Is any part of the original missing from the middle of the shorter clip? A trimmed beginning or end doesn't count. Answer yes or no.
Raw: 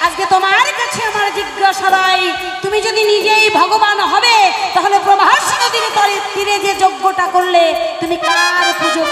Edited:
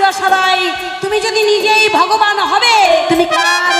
yes